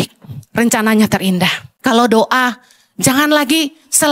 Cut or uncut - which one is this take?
cut